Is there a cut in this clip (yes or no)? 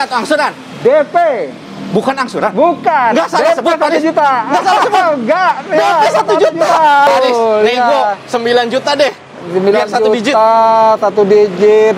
yes